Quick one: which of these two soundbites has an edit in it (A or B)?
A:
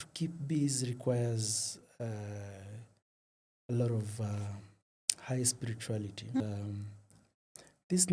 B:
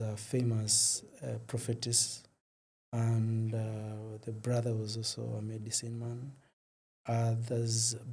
A